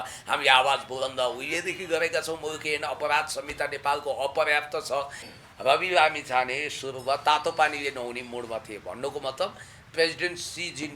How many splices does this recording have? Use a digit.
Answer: 1